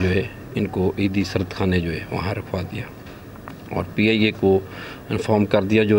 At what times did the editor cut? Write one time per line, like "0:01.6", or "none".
none